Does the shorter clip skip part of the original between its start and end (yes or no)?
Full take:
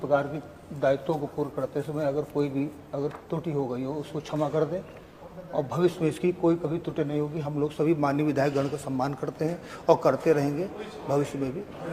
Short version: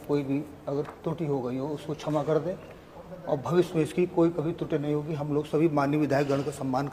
no